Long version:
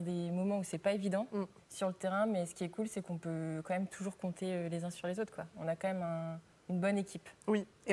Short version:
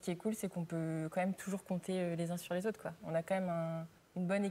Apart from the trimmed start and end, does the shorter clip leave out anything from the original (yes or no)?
no